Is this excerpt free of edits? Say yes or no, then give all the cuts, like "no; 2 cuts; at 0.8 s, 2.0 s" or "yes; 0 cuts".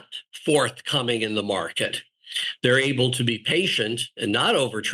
yes; 0 cuts